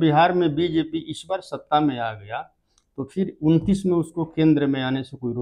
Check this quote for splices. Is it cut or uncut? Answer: uncut